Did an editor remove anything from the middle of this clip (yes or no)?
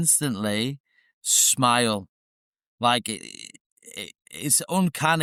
no